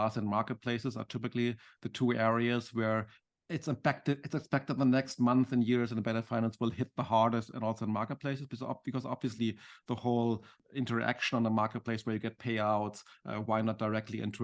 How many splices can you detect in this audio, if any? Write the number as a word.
two